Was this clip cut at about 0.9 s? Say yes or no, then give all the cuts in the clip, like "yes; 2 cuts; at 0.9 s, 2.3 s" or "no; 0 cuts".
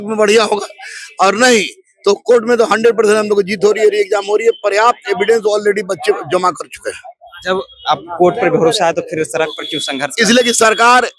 no; 0 cuts